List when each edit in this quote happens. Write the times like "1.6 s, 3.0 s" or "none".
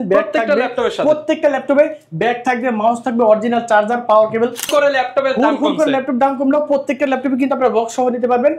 4.7 s